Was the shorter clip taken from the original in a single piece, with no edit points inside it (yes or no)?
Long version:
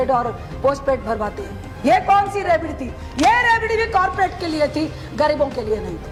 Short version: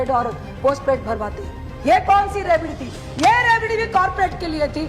yes